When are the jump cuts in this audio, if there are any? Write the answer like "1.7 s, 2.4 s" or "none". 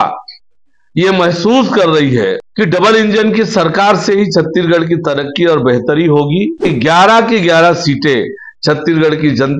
2.4 s, 6.6 s